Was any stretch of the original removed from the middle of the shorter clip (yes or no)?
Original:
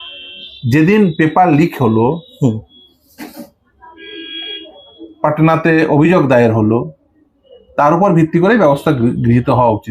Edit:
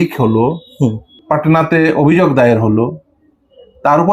yes